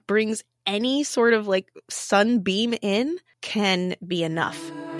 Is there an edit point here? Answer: no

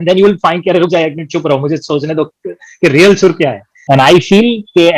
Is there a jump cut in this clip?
yes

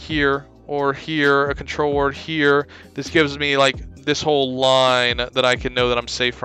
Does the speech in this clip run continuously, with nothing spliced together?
yes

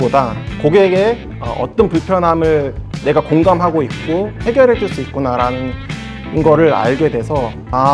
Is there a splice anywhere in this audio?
yes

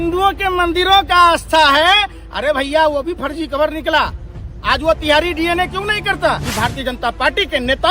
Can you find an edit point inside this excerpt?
yes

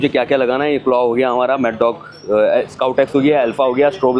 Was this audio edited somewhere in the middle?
no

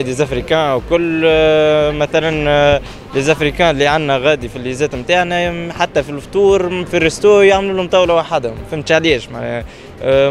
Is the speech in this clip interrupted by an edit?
no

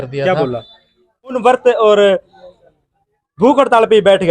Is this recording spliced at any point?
yes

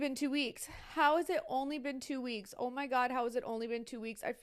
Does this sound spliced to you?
no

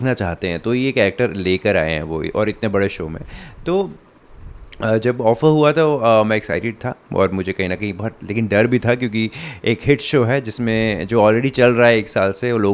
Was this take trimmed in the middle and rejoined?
no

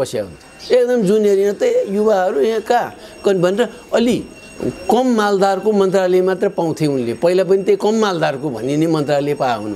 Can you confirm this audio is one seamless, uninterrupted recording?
yes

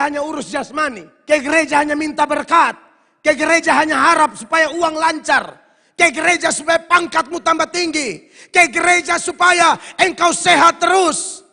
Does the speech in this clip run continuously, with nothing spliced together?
no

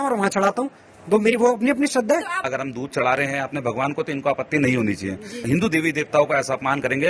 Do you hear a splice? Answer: yes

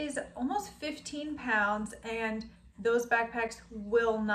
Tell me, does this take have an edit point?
no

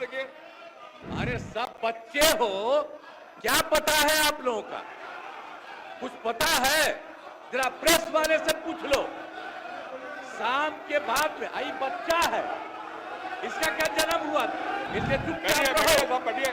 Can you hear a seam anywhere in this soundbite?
yes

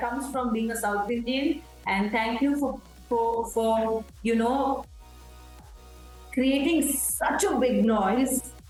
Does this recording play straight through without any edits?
yes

